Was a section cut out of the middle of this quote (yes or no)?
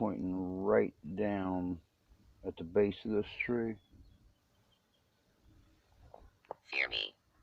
no